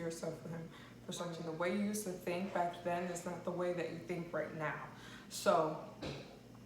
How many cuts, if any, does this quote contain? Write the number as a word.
one